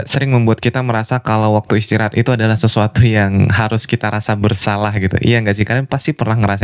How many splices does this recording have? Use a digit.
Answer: 0